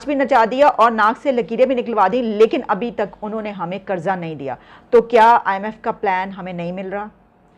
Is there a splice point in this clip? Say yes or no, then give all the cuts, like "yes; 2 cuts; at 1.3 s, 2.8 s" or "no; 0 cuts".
no; 0 cuts